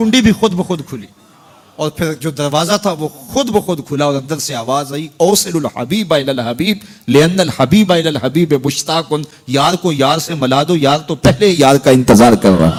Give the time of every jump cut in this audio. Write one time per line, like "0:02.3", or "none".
none